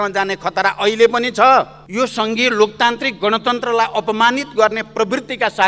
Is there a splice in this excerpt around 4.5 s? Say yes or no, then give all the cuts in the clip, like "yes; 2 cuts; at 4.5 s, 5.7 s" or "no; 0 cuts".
no; 1 cut; at 1.8 s